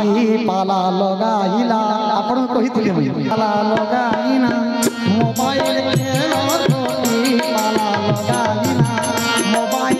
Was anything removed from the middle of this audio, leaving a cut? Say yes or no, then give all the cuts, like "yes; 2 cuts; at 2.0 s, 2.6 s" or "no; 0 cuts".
yes; 1 cut; at 3.3 s